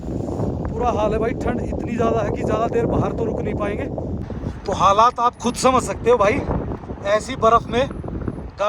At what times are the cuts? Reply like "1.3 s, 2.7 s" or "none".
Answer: 4.2 s